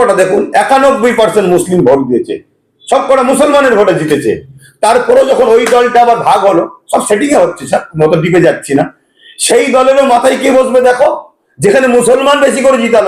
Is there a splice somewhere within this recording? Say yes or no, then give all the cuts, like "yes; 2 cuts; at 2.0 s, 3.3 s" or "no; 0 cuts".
no; 0 cuts